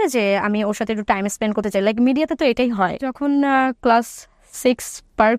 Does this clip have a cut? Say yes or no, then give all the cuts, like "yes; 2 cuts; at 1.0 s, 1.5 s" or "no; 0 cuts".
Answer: yes; 1 cut; at 3.1 s